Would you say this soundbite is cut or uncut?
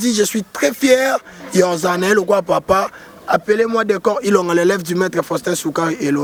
uncut